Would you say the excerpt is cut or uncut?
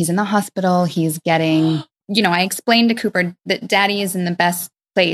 cut